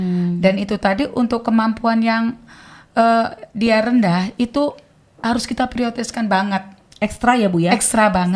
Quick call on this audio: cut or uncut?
uncut